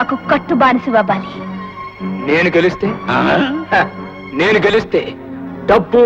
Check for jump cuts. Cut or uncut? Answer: uncut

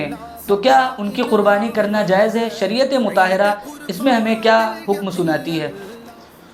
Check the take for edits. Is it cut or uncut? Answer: uncut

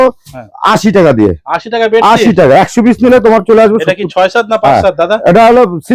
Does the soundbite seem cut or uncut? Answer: uncut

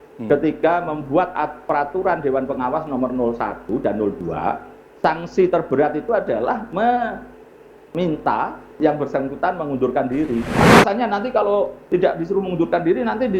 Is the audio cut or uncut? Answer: cut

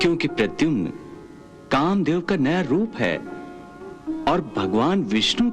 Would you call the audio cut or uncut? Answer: uncut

